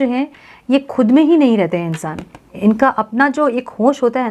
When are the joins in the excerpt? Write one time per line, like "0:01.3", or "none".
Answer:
0:02.5